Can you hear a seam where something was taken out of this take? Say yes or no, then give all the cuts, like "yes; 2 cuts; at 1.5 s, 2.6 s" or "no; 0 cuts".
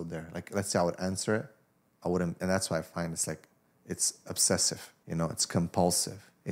yes; 1 cut; at 4.9 s